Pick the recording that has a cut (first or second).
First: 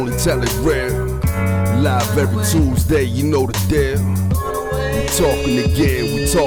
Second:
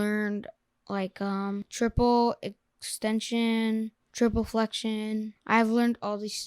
second